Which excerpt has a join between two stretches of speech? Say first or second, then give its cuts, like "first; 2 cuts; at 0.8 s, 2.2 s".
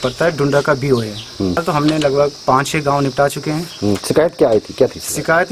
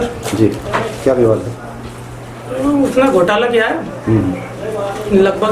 first; 1 cut; at 1.6 s